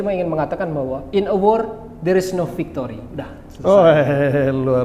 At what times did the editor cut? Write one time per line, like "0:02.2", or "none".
none